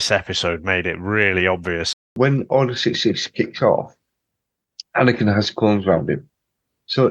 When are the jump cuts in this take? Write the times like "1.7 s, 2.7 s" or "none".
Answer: 2.1 s